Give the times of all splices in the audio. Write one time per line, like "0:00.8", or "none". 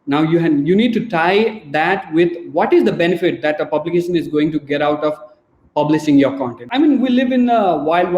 0:06.6